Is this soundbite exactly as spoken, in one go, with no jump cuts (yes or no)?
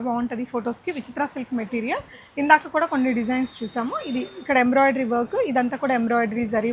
yes